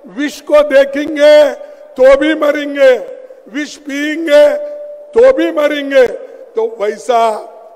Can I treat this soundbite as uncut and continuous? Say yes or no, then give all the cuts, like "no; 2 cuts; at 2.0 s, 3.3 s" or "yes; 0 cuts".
yes; 0 cuts